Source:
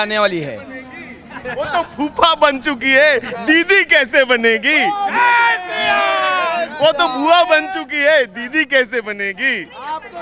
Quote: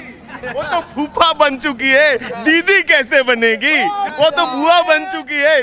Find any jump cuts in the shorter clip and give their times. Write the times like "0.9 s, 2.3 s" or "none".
4.1 s